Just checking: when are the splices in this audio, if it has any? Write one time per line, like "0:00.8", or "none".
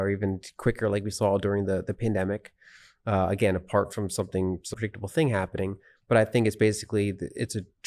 0:04.7

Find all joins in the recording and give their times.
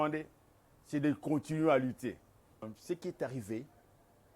0:02.7

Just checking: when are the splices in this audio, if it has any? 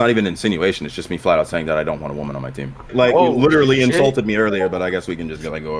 0:02.9

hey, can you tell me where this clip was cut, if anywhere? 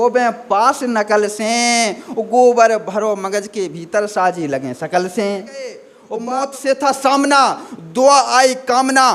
0:05.9

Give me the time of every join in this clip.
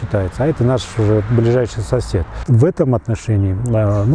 0:02.4

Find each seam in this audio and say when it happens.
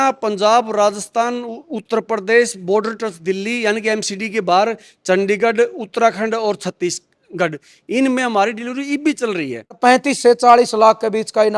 0:09.8

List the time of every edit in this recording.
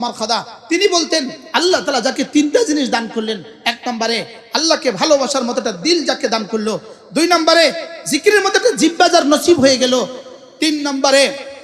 0:01.4

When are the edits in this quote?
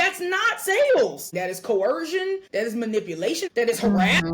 0:01.3
0:02.5
0:03.4

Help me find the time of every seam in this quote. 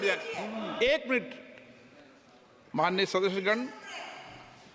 none

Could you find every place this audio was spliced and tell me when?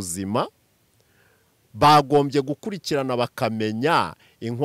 none

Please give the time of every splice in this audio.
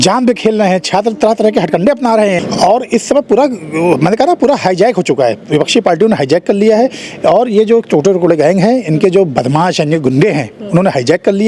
0:02.4

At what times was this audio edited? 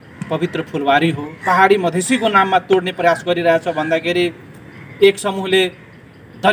0:01.4

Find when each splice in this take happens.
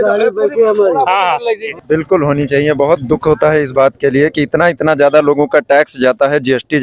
0:01.7

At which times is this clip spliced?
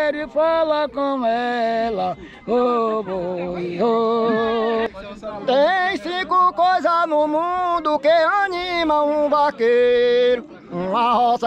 0:04.9

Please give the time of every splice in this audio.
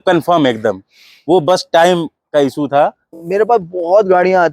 0:03.1

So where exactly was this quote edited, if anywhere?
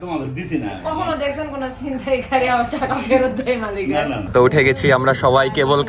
0:04.2

